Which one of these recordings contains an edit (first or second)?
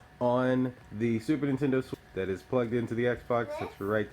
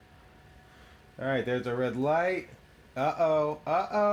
first